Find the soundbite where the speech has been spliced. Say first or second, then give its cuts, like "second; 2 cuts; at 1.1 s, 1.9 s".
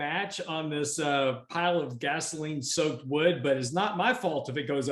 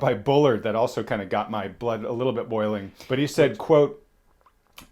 second; 1 cut; at 2.9 s